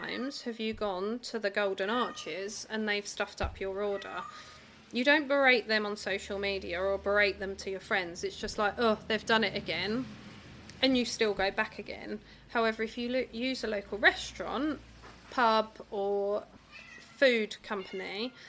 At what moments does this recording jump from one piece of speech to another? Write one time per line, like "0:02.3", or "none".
none